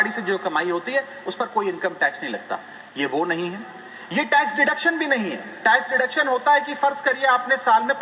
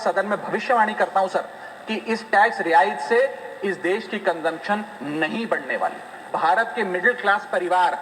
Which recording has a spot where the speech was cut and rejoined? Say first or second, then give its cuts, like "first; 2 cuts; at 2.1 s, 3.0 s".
second; 1 cut; at 6.3 s